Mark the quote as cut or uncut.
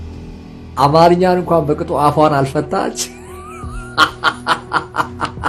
uncut